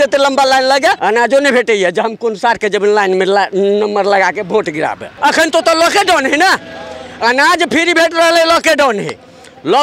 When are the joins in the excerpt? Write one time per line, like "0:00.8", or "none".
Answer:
0:01.0
0:05.1